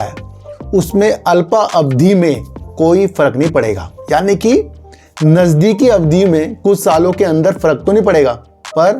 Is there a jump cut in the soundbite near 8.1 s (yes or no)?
no